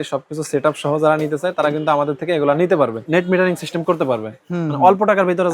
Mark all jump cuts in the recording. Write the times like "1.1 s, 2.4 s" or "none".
3.0 s